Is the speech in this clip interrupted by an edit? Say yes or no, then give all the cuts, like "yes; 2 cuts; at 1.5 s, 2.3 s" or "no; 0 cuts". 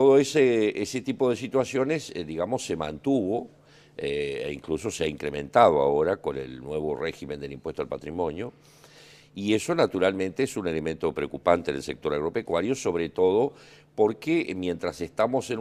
no; 0 cuts